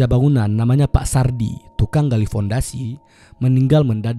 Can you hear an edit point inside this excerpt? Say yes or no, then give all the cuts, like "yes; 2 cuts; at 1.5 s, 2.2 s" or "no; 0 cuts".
no; 0 cuts